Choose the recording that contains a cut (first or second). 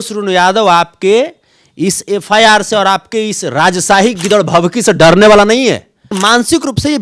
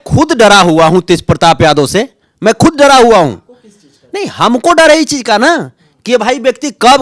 first